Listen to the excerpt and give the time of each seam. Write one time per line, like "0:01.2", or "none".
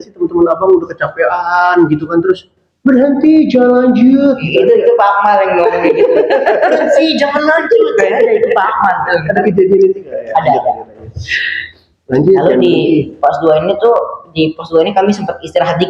none